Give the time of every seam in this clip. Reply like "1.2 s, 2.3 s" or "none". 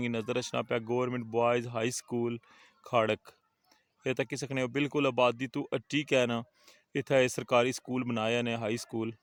none